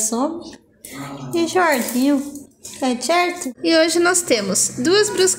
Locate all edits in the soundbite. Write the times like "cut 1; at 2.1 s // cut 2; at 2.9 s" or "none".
cut 1; at 3.5 s